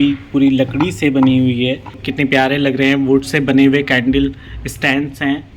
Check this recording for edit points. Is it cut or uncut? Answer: cut